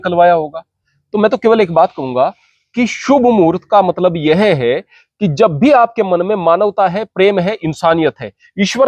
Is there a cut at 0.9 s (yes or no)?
no